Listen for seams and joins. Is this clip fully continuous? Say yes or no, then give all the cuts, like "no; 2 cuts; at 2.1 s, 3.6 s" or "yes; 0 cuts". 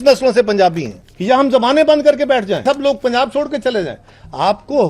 no; 2 cuts; at 1.0 s, 2.6 s